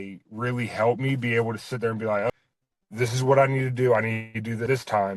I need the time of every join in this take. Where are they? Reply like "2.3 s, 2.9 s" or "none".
none